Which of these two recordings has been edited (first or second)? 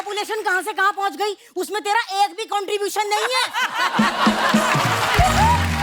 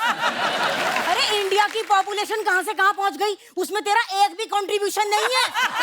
second